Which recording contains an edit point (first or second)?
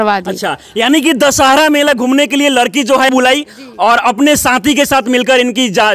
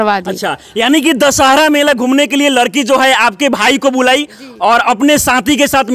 first